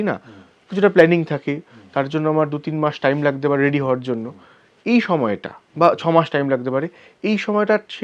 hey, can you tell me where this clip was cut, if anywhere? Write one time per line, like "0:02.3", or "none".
none